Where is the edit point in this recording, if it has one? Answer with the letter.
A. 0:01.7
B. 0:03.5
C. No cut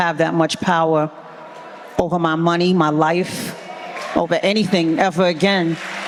C